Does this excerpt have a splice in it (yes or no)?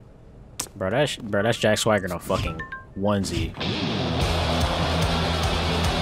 no